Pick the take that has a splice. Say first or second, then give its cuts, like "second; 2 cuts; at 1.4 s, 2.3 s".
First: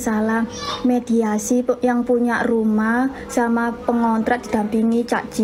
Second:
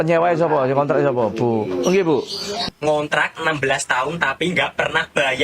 second; 1 cut; at 2.7 s